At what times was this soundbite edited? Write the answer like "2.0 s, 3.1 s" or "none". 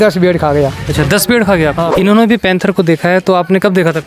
1.9 s

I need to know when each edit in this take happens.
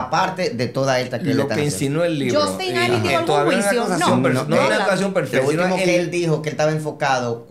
none

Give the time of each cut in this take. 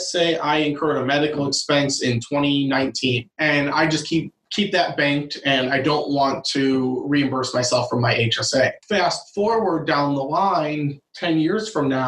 3.3 s, 4.4 s, 8.8 s

